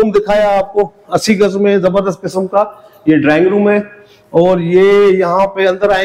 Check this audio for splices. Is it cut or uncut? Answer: uncut